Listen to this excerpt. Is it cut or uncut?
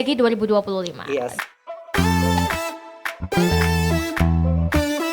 cut